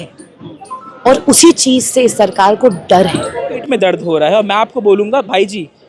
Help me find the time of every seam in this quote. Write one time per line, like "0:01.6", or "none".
0:03.6